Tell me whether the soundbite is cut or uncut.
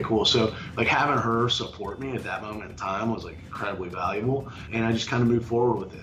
cut